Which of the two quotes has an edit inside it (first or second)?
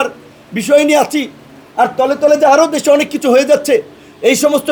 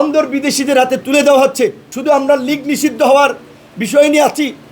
second